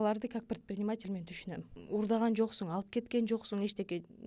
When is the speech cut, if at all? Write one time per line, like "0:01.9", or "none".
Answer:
0:01.7